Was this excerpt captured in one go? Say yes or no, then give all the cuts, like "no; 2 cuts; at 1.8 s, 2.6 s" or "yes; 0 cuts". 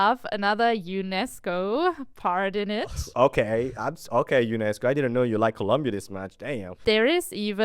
no; 1 cut; at 6.7 s